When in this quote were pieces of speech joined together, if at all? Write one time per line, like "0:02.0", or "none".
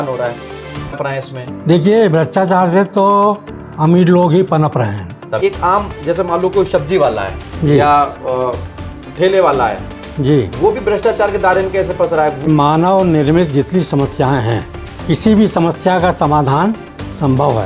0:01.0
0:05.4
0:12.5